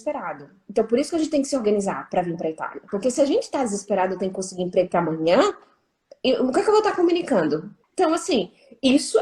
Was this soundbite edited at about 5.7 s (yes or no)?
no